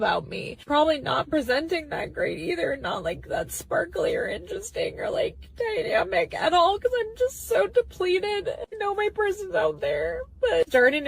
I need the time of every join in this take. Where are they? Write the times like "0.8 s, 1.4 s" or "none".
1.0 s, 4.4 s, 9.2 s